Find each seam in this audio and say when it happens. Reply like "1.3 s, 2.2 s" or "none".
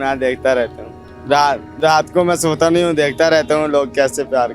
none